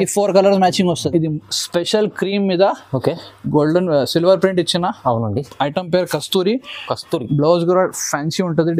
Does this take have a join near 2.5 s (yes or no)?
no